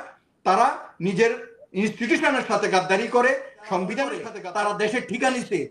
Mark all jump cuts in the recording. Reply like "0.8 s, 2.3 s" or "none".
4.3 s